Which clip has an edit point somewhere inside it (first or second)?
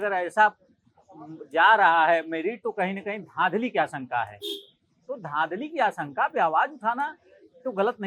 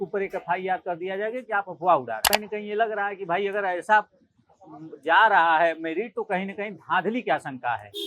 second